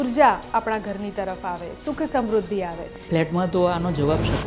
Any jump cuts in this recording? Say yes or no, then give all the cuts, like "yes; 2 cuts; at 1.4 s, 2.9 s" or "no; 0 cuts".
yes; 1 cut; at 2.9 s